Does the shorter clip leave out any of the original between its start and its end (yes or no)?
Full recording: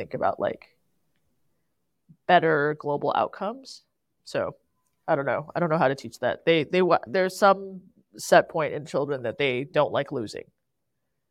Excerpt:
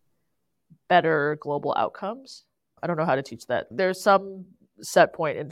yes